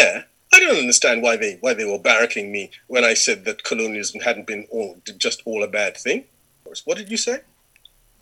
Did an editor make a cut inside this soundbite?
yes; 1 cut; at 6.7 s

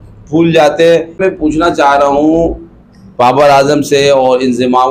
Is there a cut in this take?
yes; 1 cut; at 1.2 s

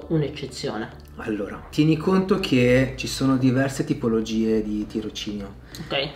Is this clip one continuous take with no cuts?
yes; 0 cuts

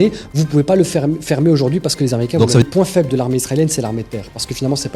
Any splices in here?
yes; 1 cut; at 2.6 s

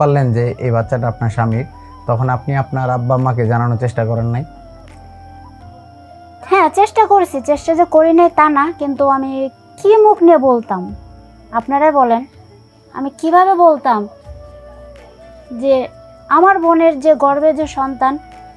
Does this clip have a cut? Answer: yes; 2 cuts; at 14.2 s, 15.5 s

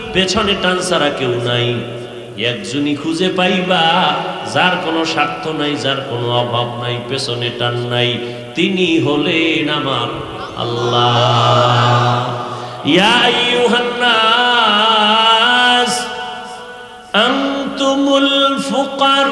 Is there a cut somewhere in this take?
no; 0 cuts

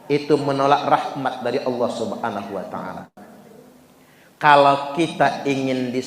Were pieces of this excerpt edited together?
yes; 1 cut; at 3.2 s

